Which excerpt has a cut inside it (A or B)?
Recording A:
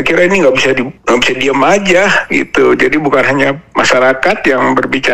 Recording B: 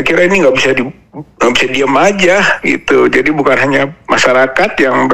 A